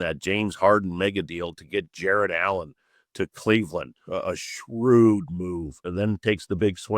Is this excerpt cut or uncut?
cut